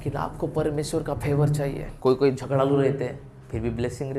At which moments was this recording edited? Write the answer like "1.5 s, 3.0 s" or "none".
1.9 s